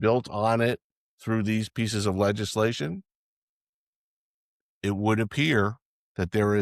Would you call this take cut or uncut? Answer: uncut